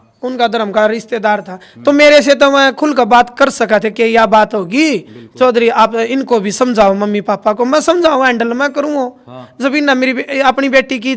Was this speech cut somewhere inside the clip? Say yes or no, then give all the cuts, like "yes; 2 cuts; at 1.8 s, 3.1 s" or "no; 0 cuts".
no; 0 cuts